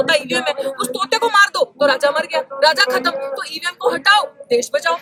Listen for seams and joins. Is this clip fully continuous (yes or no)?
yes